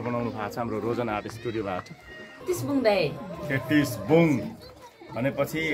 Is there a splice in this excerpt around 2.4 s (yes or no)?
yes